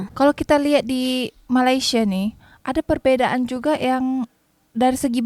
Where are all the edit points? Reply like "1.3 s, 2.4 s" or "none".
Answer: none

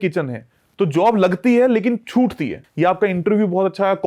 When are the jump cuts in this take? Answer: 2.6 s

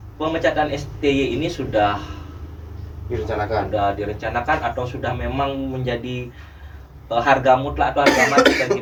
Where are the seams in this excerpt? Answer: none

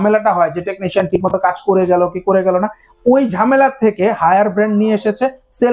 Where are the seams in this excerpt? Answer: none

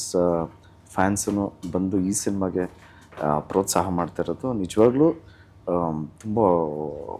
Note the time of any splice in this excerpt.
none

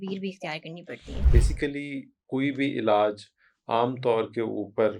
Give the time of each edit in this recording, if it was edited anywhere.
1.3 s

